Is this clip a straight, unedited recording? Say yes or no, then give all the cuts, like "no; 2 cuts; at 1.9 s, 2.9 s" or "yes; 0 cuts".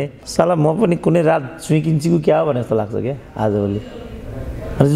yes; 0 cuts